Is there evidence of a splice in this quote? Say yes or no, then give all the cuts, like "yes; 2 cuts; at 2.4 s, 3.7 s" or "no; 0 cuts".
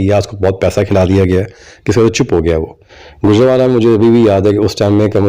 yes; 1 cut; at 2.8 s